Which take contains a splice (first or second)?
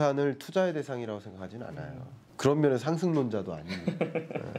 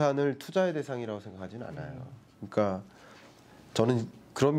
first